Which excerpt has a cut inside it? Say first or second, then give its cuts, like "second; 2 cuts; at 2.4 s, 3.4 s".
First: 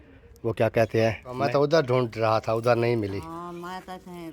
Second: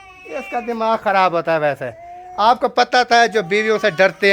first; 1 cut; at 1.4 s